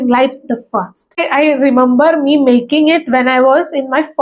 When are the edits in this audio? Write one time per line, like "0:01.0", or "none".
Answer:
0:01.3

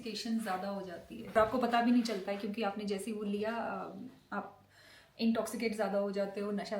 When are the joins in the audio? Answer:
0:01.3

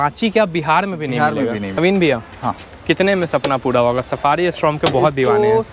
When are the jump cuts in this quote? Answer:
0:01.8

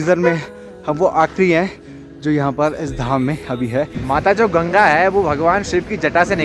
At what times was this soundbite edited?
0:04.0

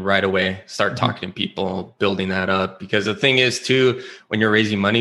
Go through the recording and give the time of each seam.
none

